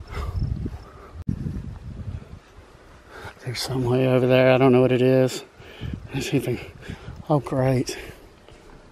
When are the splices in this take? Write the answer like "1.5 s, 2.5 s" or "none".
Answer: 1.2 s